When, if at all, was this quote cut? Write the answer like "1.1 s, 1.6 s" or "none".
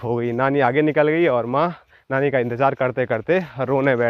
none